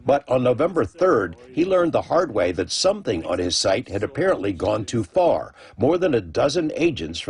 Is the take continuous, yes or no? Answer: yes